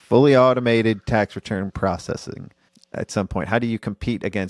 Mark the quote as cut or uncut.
uncut